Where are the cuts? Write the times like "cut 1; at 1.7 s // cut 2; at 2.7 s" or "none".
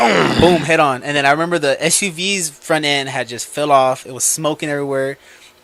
none